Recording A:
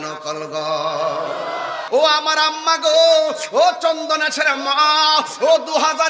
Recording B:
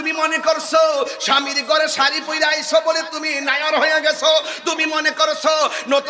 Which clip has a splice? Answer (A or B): A